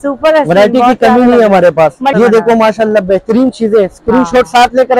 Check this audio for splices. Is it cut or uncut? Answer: cut